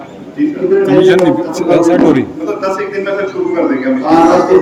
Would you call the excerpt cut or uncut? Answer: uncut